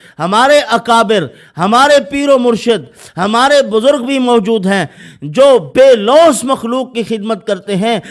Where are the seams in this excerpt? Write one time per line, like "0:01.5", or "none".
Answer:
none